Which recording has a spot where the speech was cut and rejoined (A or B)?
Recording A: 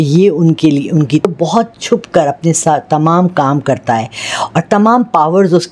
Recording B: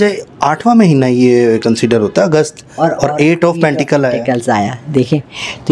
A